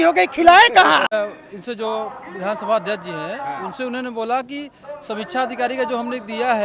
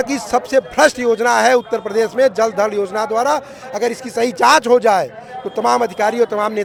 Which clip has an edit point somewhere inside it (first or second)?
first